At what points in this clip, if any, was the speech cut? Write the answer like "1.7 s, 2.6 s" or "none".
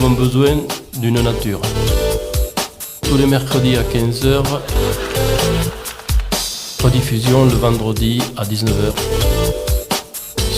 9.0 s